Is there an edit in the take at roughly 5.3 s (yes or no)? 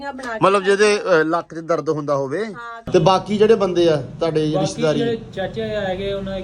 no